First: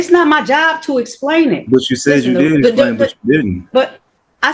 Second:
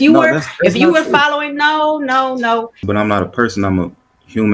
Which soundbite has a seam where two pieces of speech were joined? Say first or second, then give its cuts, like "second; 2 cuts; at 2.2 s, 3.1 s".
second; 1 cut; at 2.8 s